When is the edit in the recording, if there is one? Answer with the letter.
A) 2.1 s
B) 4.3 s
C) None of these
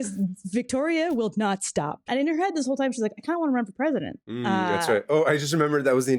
A